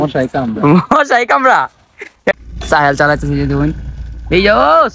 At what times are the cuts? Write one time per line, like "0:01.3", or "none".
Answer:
0:02.4